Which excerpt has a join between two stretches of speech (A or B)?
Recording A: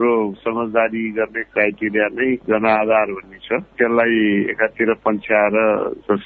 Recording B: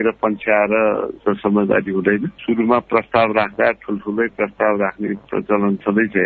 B